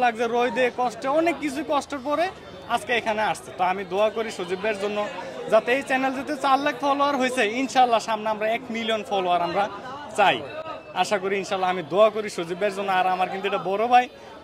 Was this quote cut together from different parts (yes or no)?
no